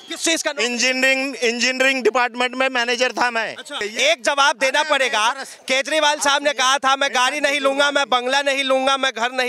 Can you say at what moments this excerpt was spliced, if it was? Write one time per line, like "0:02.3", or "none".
0:03.7